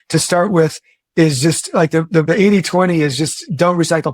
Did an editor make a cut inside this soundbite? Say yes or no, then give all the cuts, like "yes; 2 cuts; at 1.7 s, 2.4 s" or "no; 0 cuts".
yes; 1 cut; at 2.2 s